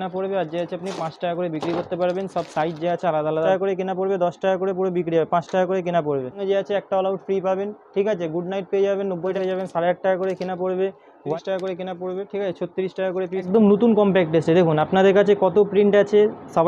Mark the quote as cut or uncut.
cut